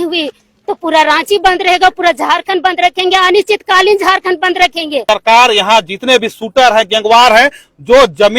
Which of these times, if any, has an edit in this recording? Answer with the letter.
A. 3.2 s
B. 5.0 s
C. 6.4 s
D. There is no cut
B